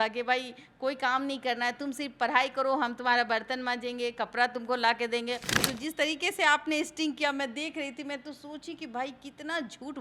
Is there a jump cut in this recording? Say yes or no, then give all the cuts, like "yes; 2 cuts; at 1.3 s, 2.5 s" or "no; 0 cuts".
yes; 1 cut; at 5.5 s